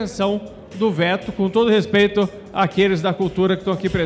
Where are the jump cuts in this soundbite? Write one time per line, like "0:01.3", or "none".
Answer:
none